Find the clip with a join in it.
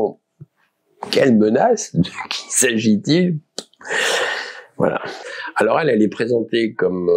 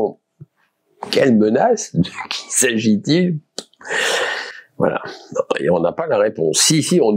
first; 1 cut; at 5.2 s

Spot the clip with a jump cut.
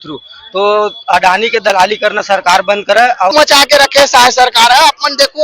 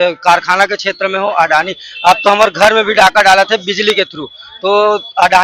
first; 1 cut; at 3.3 s

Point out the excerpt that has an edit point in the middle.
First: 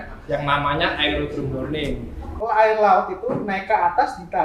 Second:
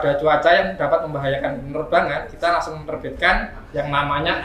first; 1 cut; at 2.3 s

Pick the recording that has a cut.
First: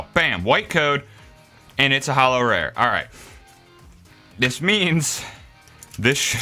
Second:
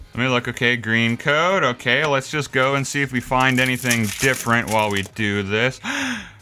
first; 1 cut; at 1.7 s

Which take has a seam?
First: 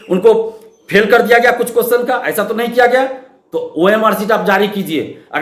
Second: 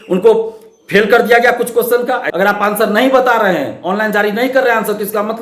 second; 1 cut; at 2.3 s

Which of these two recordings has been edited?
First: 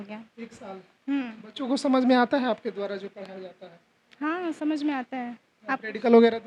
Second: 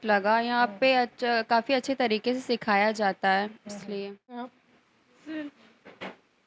second; 1 cut; at 4.6 s

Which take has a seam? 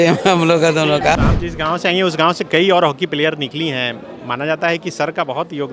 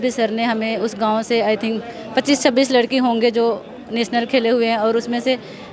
first; 1 cut; at 1.2 s

